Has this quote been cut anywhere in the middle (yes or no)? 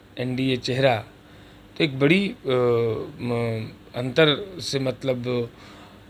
no